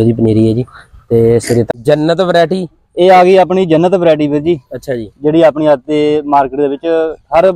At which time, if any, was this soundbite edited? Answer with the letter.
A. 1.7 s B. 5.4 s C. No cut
A